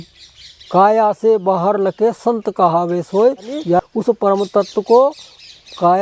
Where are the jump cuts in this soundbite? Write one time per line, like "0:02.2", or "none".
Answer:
0:03.8